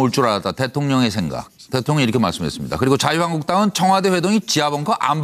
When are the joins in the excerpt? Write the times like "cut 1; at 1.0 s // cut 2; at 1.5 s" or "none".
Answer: cut 1; at 3.4 s